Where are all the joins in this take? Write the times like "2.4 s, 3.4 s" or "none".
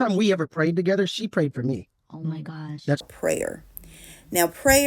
3.1 s